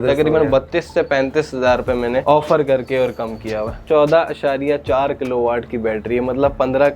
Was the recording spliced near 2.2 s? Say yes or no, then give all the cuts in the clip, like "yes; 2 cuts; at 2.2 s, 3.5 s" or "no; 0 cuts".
yes; 2 cuts; at 2.2 s, 3.8 s